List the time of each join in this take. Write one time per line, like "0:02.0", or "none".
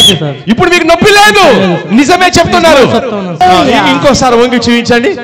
0:03.4